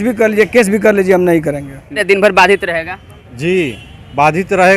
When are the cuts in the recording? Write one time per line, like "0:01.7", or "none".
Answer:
0:02.0